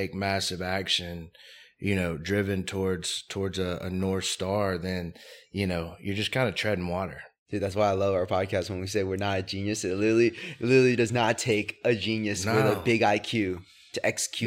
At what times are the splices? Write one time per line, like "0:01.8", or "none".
none